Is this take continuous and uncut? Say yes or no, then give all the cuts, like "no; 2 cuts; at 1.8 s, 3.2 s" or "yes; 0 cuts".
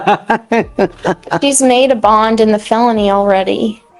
yes; 0 cuts